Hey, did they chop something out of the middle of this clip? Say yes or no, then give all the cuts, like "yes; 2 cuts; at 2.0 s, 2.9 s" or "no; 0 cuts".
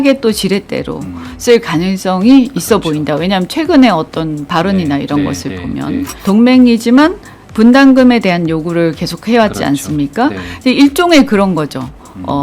yes; 1 cut; at 6.1 s